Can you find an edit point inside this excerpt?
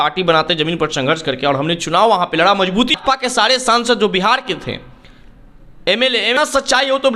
yes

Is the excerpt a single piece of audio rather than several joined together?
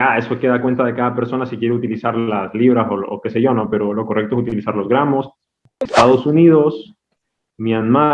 no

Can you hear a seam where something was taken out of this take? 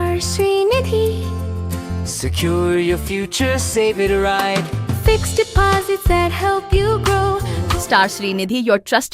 yes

